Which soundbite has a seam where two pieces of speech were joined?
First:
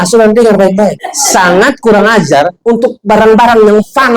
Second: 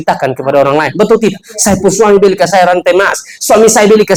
first; 2 cuts; at 1.1 s, 2.6 s

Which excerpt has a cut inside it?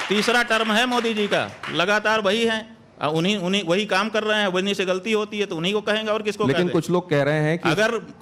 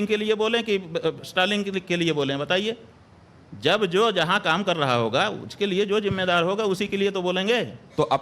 second; 1 cut; at 6.9 s

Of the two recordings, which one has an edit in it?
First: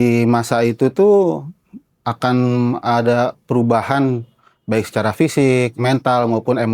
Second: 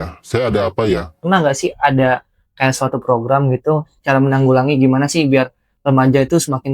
second; 1 cut; at 1.2 s

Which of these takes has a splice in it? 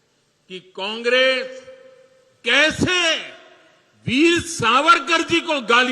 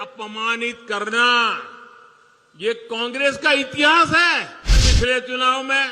second; 1 cut; at 4.8 s

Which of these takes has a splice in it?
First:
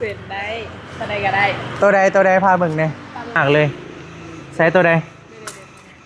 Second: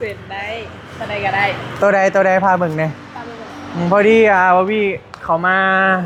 first; 1 cut; at 3.4 s

